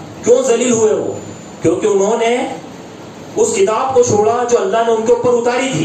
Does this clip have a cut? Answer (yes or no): no